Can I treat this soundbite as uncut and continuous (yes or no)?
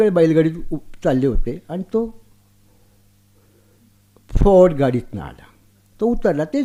yes